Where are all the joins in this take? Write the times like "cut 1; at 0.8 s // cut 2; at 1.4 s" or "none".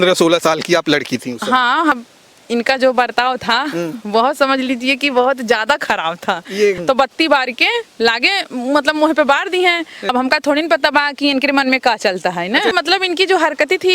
cut 1; at 2.0 s // cut 2; at 6.8 s // cut 3; at 10.0 s // cut 4; at 12.7 s